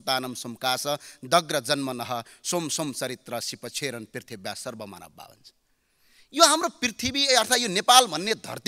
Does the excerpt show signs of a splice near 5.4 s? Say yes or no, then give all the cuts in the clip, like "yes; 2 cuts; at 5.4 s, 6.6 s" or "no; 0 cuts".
no; 0 cuts